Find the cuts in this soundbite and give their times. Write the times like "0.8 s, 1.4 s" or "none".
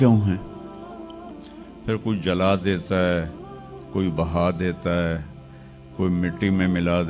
none